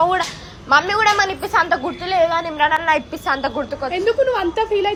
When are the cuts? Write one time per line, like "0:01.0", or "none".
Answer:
none